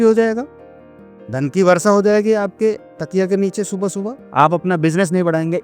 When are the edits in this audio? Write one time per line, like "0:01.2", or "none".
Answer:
0:04.2